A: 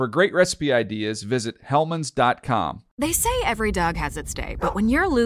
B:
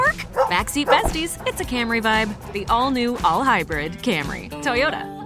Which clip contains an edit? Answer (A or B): A